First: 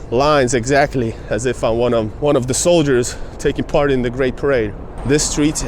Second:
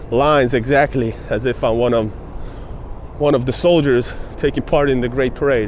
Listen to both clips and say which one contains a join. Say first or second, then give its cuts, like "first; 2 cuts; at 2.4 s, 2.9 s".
first; 2 cuts; at 2.1 s, 4.8 s